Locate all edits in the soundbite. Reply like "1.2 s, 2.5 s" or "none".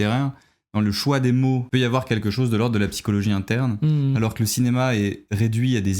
1.6 s